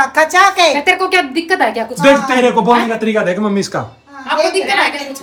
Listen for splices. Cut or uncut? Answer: uncut